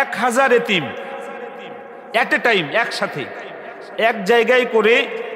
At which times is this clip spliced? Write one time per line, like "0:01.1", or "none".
none